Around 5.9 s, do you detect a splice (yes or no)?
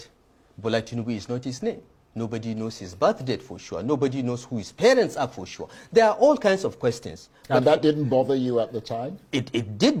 no